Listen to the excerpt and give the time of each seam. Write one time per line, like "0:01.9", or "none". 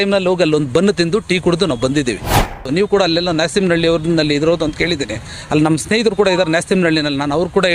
0:02.7